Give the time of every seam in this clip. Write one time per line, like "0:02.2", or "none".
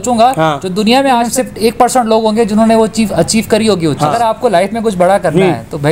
0:01.1
0:04.4